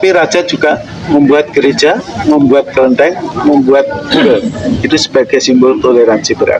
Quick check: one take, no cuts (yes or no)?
yes